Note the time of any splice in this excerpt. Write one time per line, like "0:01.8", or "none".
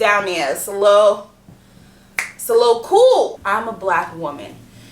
0:03.4